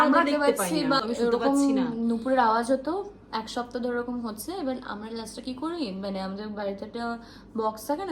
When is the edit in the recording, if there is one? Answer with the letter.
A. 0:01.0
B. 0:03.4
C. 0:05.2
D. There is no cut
A